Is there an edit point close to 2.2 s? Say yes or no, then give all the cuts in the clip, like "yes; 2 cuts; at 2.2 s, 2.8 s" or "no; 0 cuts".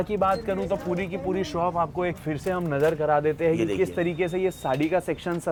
no; 0 cuts